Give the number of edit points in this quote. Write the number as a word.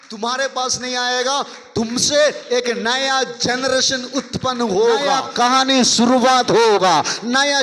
one